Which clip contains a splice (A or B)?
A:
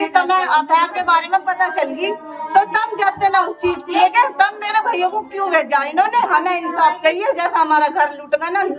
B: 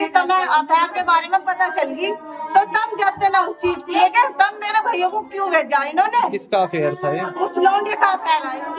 A